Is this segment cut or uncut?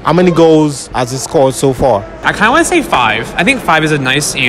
cut